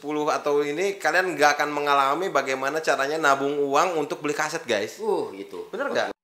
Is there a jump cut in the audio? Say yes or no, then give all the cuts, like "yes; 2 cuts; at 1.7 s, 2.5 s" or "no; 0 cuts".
no; 0 cuts